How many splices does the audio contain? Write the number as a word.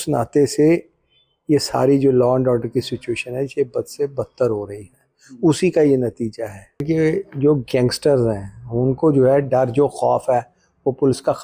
one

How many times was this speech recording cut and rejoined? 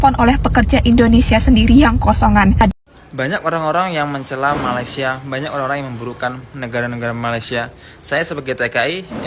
one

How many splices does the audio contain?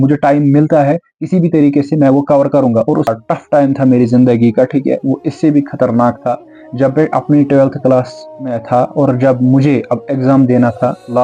one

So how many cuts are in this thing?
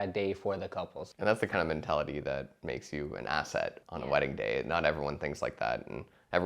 three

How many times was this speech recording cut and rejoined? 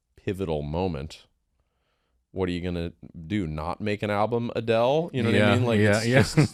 zero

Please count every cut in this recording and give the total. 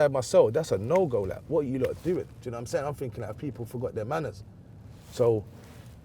zero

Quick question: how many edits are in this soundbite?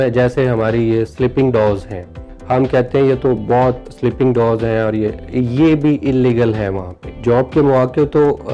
three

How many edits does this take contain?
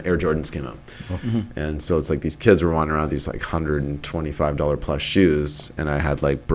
zero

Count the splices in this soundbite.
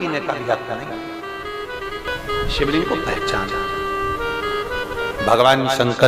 one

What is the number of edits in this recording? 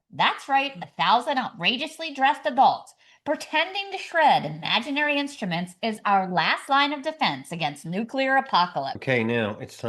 one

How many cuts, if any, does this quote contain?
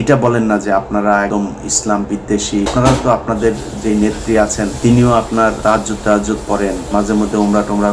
five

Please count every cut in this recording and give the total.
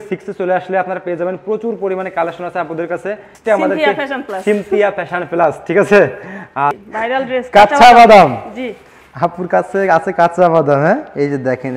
two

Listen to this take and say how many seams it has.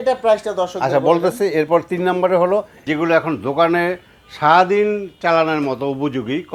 one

